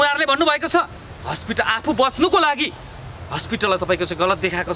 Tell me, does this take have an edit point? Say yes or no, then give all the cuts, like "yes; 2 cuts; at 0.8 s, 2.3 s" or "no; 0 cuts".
no; 0 cuts